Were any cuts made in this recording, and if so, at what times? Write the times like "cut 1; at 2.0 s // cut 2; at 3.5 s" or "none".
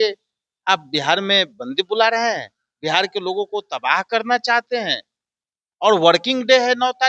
none